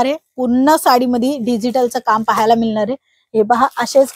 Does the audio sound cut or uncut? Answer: uncut